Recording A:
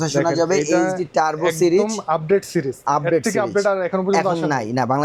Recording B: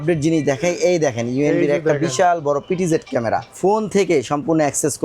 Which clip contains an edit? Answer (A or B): B